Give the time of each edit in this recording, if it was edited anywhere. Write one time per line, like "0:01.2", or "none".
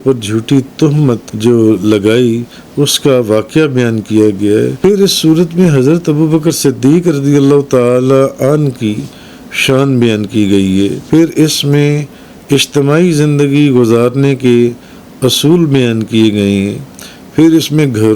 0:01.3
0:04.7
0:11.0